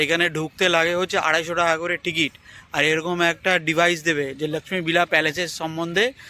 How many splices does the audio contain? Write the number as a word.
zero